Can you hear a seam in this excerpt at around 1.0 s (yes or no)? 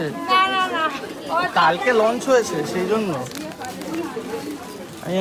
no